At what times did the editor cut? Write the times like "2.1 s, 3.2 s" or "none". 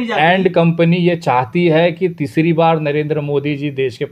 none